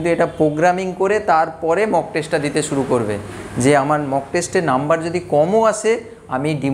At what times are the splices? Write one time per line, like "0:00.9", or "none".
none